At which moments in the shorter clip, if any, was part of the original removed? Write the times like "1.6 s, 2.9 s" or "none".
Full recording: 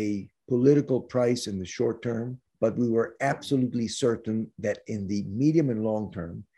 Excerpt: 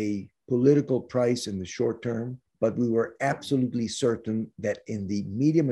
none